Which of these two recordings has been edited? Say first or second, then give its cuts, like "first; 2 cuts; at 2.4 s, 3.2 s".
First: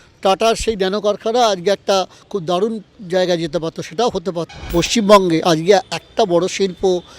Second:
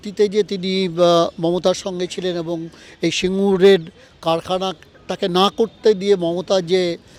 first; 1 cut; at 4.5 s